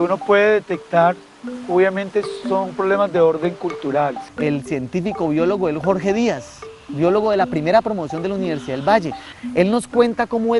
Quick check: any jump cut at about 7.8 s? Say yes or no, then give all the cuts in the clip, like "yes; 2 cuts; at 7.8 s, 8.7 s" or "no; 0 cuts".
no; 1 cut; at 4.2 s